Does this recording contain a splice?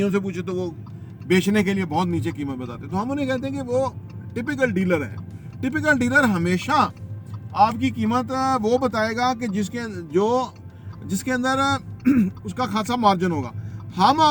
no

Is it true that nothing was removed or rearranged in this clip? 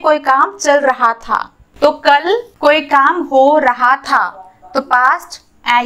no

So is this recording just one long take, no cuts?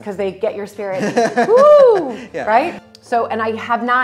yes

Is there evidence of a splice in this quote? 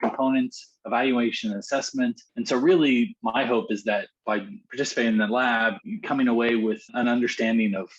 yes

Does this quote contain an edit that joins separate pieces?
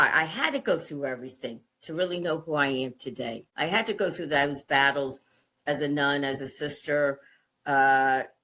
yes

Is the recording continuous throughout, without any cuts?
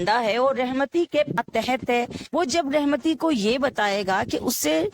yes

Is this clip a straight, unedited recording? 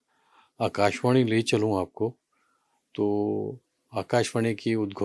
yes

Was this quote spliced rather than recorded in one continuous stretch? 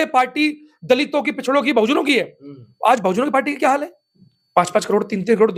no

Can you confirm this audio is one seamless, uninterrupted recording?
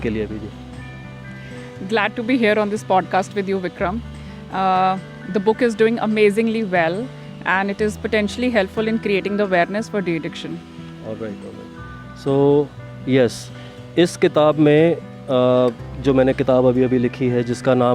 yes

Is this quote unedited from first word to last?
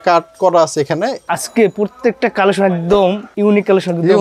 no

